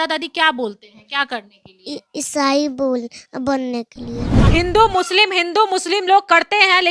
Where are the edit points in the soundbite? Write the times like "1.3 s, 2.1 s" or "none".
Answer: 4.4 s